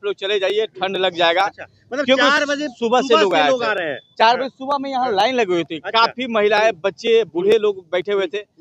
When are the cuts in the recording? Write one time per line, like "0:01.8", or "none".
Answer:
none